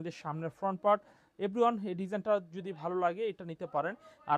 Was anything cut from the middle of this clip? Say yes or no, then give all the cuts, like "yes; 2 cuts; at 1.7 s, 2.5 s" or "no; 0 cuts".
no; 0 cuts